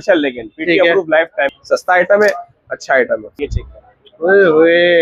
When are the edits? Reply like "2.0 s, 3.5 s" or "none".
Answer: 1.5 s, 3.4 s

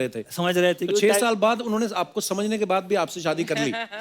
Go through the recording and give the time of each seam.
none

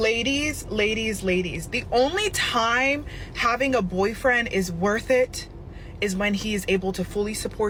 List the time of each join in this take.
none

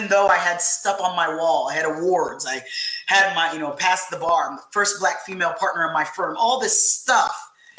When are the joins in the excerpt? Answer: none

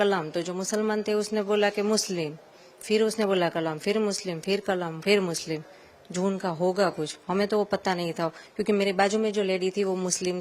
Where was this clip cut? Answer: none

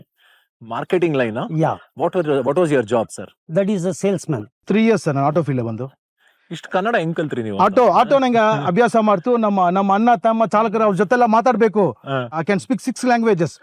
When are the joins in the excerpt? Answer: 4.5 s, 12.3 s

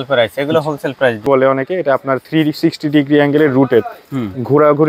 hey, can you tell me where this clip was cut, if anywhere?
1.2 s

